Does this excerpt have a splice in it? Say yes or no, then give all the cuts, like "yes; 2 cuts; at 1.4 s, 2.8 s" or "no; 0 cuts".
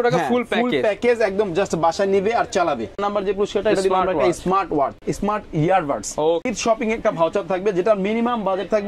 yes; 3 cuts; at 3.0 s, 5.1 s, 6.5 s